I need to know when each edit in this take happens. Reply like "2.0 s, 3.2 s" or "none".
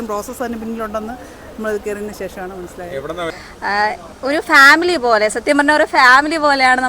3.4 s